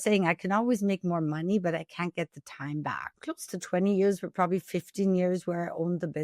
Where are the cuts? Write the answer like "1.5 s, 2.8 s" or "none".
3.0 s